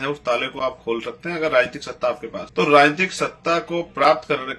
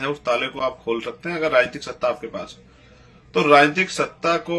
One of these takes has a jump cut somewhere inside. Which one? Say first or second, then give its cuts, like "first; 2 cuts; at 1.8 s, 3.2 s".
first; 1 cut; at 2.3 s